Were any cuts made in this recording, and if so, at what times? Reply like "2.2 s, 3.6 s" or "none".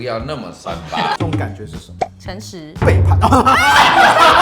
1.2 s